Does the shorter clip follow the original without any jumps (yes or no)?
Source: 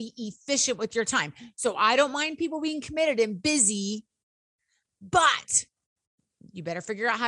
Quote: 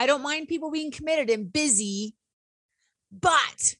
yes